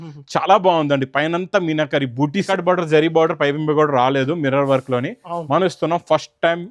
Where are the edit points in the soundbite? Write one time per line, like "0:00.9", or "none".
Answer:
0:02.5